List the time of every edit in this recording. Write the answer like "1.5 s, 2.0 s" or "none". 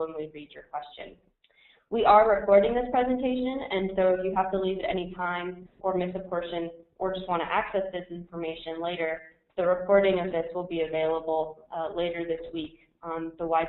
none